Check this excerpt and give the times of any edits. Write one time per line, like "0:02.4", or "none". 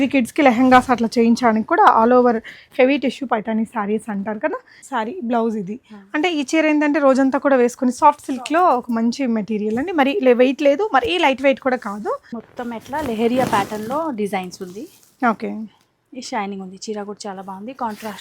0:04.8
0:12.3